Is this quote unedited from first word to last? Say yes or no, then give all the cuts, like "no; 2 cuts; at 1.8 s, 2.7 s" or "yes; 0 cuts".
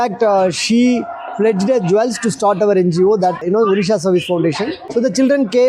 no; 2 cuts; at 3.4 s, 4.8 s